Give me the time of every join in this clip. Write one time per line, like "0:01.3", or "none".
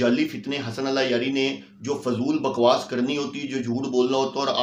none